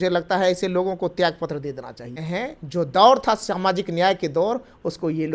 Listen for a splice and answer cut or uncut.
cut